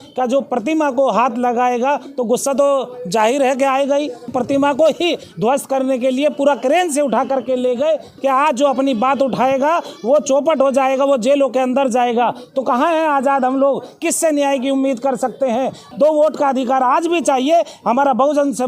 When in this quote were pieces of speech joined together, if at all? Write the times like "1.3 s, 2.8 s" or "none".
4.3 s, 8.1 s, 15.8 s